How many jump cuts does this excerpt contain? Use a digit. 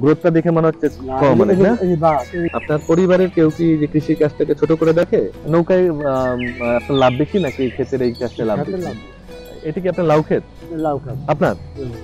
3